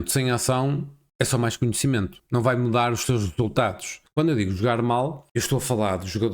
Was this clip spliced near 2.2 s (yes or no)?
yes